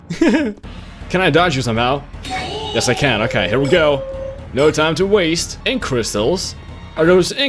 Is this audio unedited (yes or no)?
no